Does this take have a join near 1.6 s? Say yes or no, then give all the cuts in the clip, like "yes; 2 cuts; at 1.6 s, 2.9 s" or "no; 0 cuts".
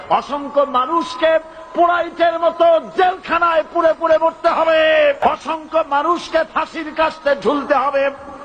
no; 1 cut; at 5.2 s